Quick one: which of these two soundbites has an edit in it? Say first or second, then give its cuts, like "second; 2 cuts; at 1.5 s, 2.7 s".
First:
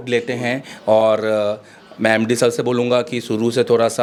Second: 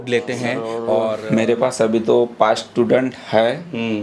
second; 1 cut; at 1.1 s